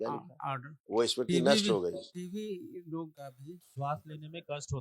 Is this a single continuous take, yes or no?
no